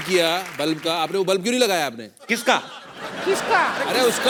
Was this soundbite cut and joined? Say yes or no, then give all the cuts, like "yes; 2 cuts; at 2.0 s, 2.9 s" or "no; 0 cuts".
no; 0 cuts